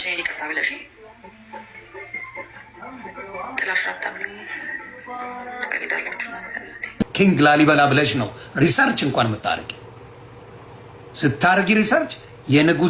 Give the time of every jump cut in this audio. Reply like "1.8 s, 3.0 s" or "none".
7.0 s